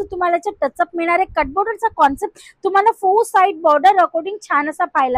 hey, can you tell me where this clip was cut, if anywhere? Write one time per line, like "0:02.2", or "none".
none